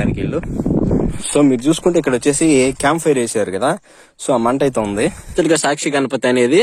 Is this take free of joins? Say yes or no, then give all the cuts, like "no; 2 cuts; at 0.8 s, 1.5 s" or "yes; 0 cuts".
no; 2 cuts; at 1.0 s, 5.3 s